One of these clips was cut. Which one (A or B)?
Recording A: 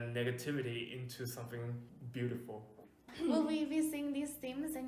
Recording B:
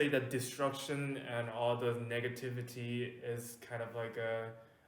A